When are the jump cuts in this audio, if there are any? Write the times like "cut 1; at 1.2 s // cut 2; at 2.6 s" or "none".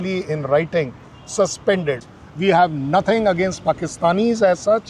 cut 1; at 2.1 s